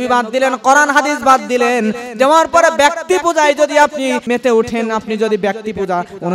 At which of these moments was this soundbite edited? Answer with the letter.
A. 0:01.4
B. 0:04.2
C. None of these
B